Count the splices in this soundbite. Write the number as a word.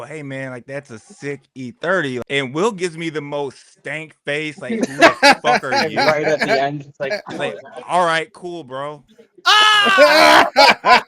one